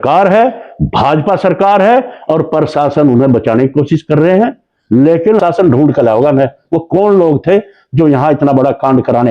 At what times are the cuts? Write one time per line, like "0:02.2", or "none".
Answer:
0:05.4